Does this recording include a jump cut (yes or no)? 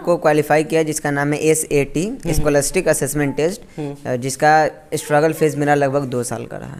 no